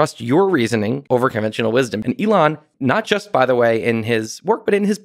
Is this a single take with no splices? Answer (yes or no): no